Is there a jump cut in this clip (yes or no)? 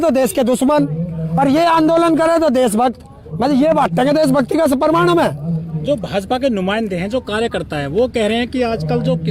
no